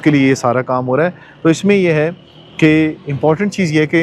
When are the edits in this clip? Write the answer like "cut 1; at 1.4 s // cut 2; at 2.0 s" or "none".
none